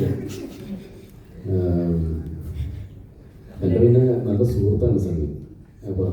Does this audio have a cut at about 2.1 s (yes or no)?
no